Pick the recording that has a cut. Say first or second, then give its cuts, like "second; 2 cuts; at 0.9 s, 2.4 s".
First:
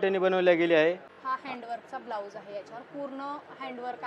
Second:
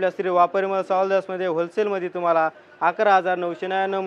first; 1 cut; at 1.1 s